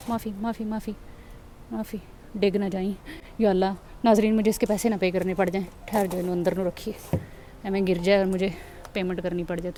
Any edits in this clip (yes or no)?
no